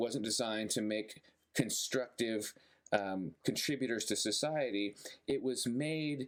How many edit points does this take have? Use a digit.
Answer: 0